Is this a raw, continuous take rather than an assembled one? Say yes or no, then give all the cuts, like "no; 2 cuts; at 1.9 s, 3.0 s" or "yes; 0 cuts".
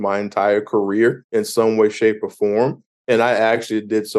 no; 1 cut; at 1.2 s